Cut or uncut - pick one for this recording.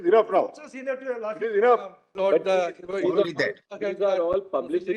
cut